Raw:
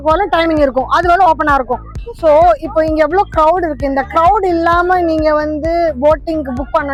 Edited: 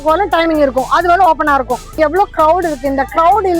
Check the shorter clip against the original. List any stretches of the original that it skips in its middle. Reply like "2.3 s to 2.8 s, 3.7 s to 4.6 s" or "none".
1.9 s to 2.9 s